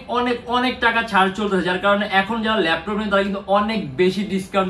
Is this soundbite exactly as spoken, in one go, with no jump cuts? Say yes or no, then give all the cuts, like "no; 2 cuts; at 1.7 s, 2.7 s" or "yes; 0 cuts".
yes; 0 cuts